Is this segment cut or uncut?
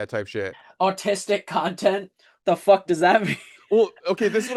uncut